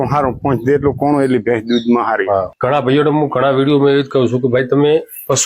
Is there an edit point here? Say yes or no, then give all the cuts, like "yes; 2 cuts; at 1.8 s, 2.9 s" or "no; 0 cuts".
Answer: yes; 1 cut; at 2.5 s